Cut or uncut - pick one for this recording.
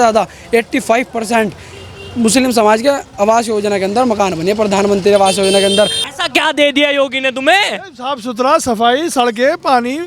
cut